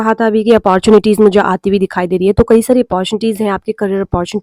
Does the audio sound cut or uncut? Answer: uncut